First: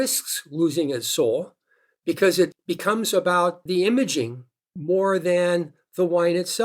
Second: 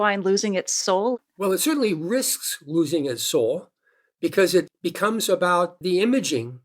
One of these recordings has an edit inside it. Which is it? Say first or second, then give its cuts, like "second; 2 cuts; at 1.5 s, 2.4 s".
second; 1 cut; at 1.1 s